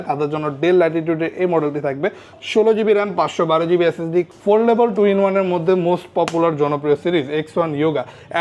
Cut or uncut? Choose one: cut